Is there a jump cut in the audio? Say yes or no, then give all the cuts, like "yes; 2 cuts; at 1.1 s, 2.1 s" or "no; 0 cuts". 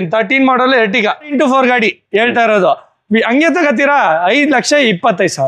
yes; 1 cut; at 1.3 s